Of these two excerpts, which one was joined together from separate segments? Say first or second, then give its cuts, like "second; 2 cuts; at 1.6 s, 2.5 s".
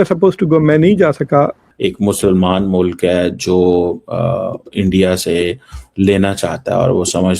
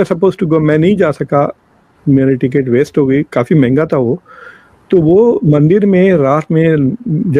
first; 1 cut; at 1.7 s